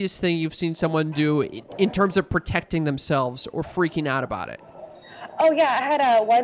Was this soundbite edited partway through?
no; 0 cuts

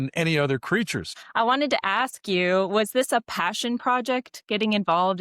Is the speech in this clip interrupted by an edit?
yes; 1 cut; at 1.2 s

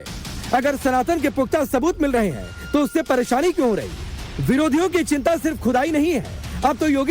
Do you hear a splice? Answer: no; 0 cuts

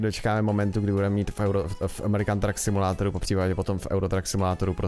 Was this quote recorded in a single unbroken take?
yes; 0 cuts

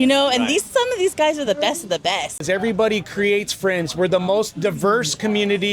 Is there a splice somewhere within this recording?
yes; 1 cut; at 2.4 s

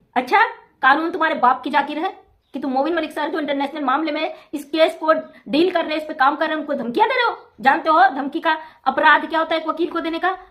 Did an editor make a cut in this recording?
no; 0 cuts

